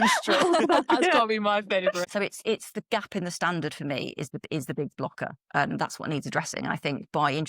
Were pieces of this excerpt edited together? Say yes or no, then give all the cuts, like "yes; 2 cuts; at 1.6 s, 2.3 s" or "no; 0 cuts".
yes; 1 cut; at 2.0 s